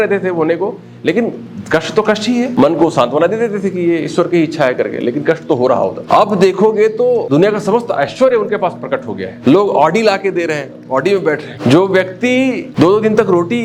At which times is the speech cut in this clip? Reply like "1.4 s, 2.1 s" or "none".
2.5 s, 6.0 s, 7.2 s, 9.2 s, 11.5 s, 12.7 s